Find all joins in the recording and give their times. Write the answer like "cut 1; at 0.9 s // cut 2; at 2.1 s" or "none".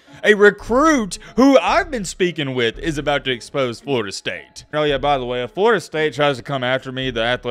cut 1; at 4.7 s